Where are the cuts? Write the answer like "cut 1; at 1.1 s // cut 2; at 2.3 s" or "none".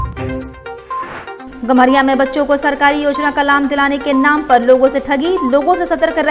cut 1; at 1.5 s

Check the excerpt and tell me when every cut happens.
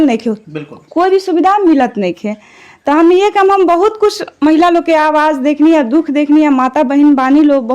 none

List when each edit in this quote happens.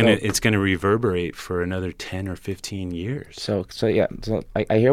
none

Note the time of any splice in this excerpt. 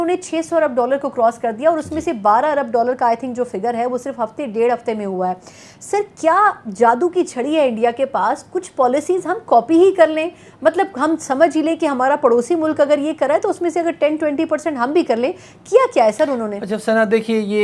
none

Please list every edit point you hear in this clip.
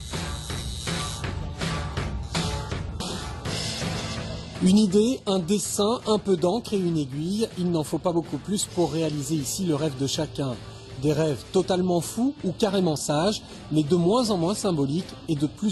cut 1; at 7.1 s

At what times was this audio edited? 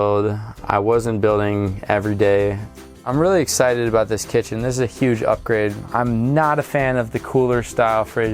cut 1; at 3.1 s // cut 2; at 5.8 s

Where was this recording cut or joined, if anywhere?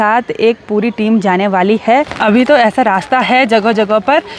cut 1; at 2.2 s

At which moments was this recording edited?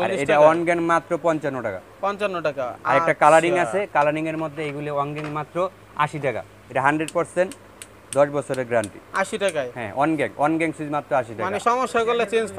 none

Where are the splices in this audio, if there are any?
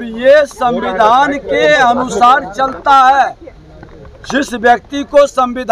none

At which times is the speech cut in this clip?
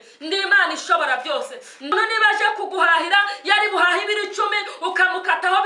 cut 1; at 1.9 s

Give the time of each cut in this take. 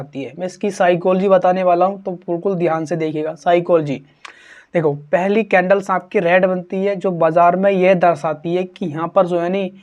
none

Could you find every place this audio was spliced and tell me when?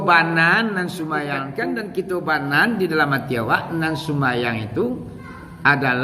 cut 1; at 1.5 s

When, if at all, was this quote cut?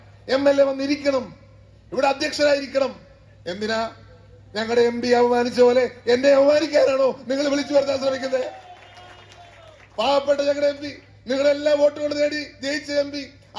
none

